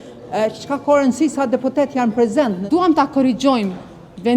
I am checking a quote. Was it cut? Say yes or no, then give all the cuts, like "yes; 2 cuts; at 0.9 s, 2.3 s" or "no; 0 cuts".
yes; 1 cut; at 2.6 s